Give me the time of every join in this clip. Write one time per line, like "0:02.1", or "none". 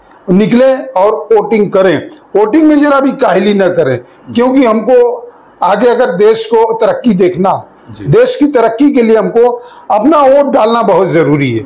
none